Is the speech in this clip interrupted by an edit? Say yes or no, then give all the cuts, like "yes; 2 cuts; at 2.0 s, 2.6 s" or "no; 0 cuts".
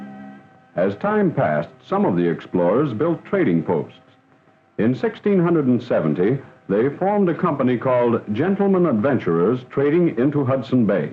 yes; 1 cut; at 3.9 s